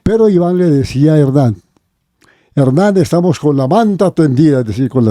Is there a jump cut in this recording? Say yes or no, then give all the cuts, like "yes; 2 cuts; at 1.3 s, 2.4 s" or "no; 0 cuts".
no; 0 cuts